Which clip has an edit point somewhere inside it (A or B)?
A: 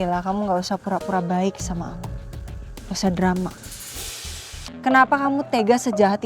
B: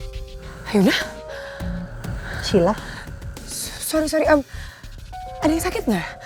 A